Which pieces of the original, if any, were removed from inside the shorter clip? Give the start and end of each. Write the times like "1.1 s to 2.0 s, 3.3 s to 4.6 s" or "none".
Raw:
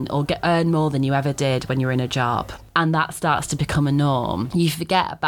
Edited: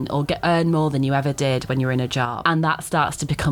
2.3 s to 2.6 s